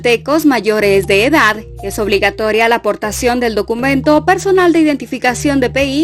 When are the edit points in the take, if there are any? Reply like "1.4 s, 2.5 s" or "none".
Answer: 1.2 s